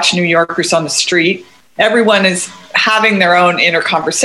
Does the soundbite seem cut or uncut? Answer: cut